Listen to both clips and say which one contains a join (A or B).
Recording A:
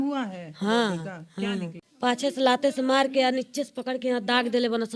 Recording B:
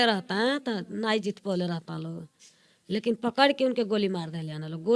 A